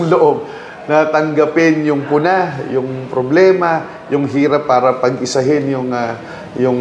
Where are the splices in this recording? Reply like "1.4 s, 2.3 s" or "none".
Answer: none